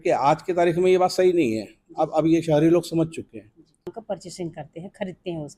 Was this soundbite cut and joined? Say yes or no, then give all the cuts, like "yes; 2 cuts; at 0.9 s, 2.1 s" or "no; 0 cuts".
yes; 1 cut; at 3.9 s